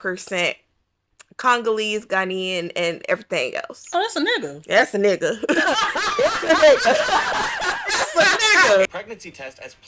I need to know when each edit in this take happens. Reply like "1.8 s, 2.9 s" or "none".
8.9 s